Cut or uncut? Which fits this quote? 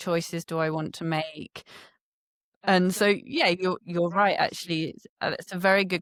uncut